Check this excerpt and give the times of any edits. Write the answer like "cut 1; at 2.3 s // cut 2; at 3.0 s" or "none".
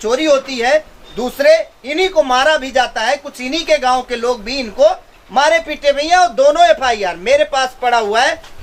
none